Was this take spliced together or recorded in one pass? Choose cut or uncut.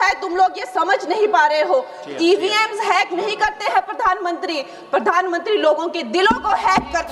uncut